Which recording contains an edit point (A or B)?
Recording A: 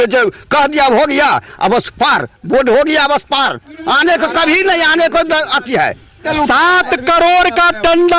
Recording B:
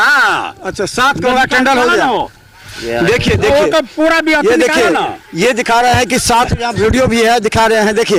A